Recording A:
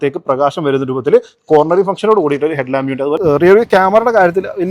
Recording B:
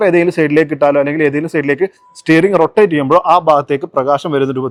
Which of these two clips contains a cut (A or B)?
A